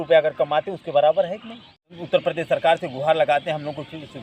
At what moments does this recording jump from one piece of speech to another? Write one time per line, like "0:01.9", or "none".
0:02.0